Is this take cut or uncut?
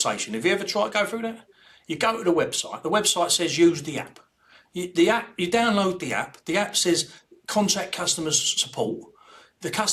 uncut